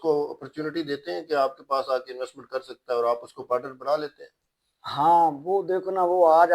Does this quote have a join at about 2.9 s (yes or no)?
no